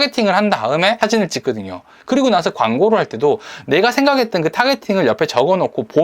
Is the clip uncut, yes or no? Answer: no